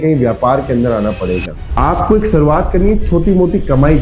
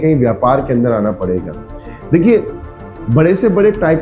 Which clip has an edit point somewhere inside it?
first; 1 cut; at 1.6 s

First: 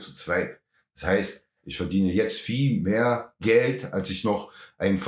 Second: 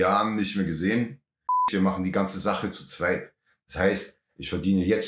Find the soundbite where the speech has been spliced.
second; 1 cut; at 1.7 s

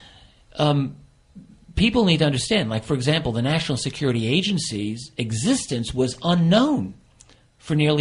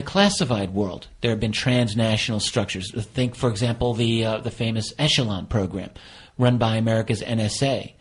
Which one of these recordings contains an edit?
second; 1 cut; at 5.5 s

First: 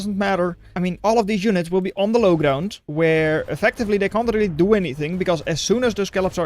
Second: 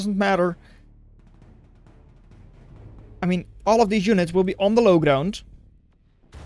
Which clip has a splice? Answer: first; 2 cuts; at 0.9 s, 2.8 s

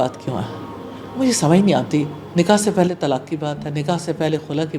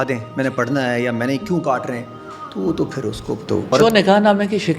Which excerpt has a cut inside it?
second; 1 cut; at 3.7 s

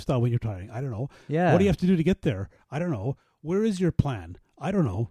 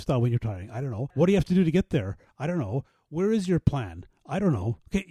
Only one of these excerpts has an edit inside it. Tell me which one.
second; 1 cut; at 1.2 s

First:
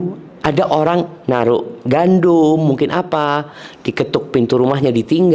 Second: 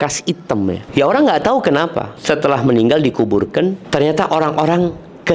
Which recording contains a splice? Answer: second; 3 cuts; at 0.8 s, 2.1 s, 3.8 s

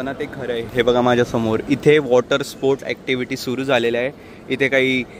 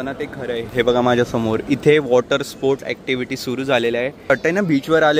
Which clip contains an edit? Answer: second; 1 cut; at 4.1 s

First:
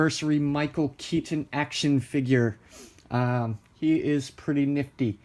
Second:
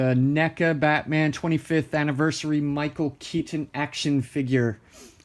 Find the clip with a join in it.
second; 1 cut; at 1.0 s

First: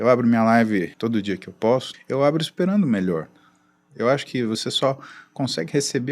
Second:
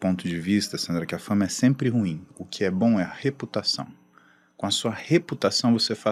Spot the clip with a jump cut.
first; 2 cuts; at 0.9 s, 1.9 s

